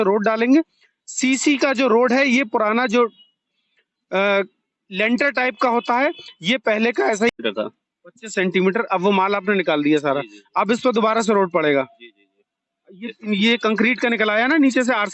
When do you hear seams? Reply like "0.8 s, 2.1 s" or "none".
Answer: 7.4 s